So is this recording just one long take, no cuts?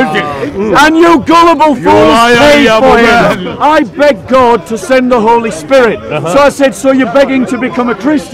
no; 1 cut; at 3.5 s

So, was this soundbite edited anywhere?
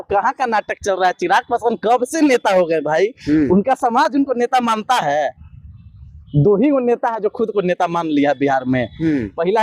no; 0 cuts

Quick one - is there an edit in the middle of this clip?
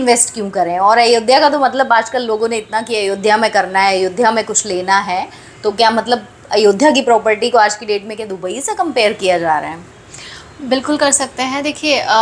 no; 0 cuts

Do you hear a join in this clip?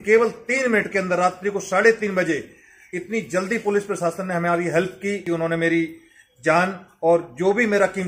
yes; 1 cut; at 5.2 s

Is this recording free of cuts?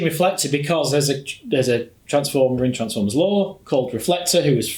yes; 0 cuts

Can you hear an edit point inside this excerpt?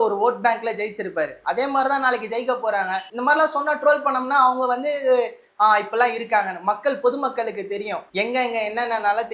no; 0 cuts

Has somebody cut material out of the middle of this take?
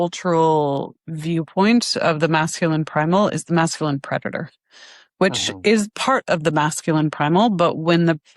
no; 0 cuts

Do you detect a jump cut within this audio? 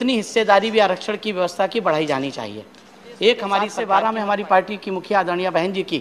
yes; 1 cut; at 3.7 s

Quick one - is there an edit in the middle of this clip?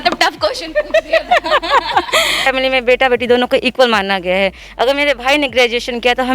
yes; 1 cut; at 2.5 s

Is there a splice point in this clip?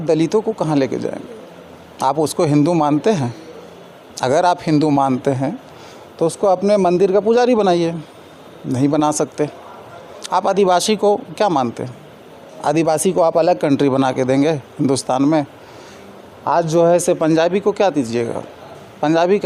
no; 0 cuts

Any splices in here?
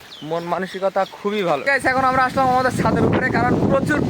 yes; 1 cut; at 1.6 s

